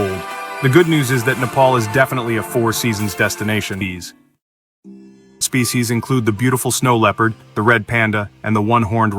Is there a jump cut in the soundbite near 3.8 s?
yes; 2 cuts; at 3.8 s, 5.4 s

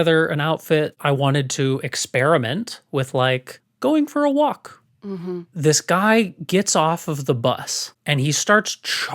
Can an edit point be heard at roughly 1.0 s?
yes; 3 cuts; at 1.0 s, 5.5 s, 7.9 s

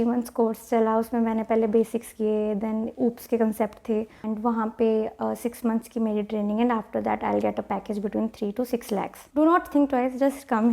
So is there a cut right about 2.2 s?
no; 2 cuts; at 4.2 s, 9.2 s

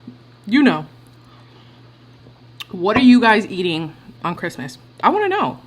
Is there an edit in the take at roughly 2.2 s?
yes; 1 cut; at 2.2 s

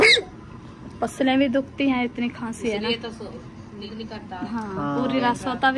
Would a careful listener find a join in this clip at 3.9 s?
yes; 1 cut; at 3.9 s

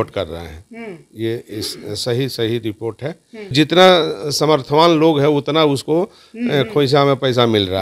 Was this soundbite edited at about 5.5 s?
no; 1 cut; at 3.5 s

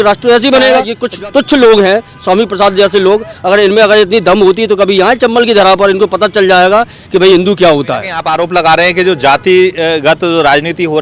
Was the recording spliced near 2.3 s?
no; 2 cuts; at 1.0 s, 8.1 s

